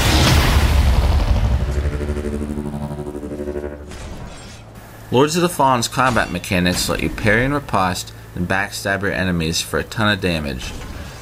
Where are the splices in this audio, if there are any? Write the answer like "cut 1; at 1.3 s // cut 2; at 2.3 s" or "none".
cut 1; at 1.8 s